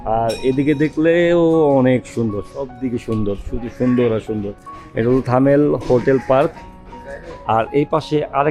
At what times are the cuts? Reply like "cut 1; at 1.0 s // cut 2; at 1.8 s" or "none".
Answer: none

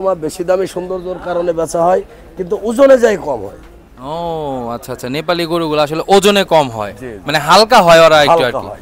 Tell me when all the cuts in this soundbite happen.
none

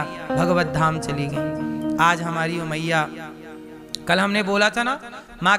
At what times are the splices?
none

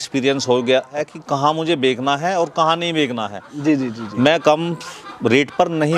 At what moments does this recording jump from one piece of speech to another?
cut 1; at 1.0 s

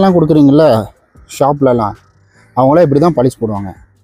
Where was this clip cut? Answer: none

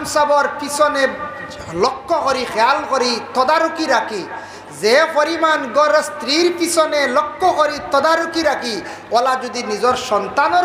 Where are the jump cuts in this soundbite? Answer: none

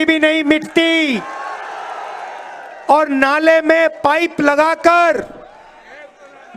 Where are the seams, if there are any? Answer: none

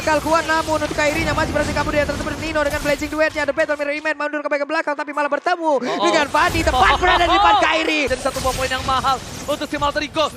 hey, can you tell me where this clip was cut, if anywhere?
cut 1; at 8.1 s

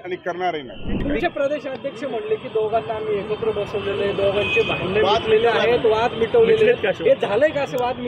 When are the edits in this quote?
cut 1; at 1.0 s

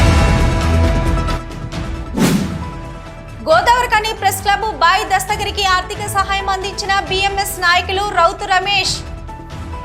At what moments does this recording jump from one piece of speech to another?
cut 1; at 1.0 s

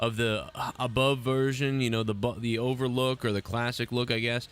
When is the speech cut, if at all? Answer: cut 1; at 3.4 s

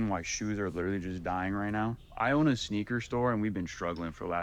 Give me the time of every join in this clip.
cut 1; at 2.0 s

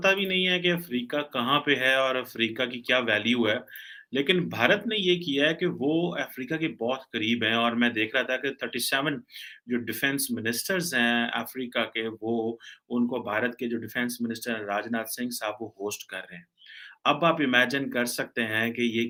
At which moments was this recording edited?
none

